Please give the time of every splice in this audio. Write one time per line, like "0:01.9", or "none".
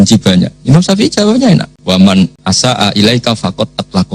0:01.7
0:02.4